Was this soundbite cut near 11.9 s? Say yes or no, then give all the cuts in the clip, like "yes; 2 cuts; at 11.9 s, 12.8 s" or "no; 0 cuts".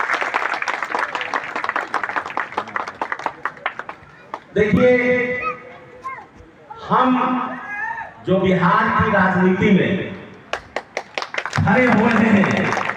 no; 2 cuts; at 4.8 s, 8.0 s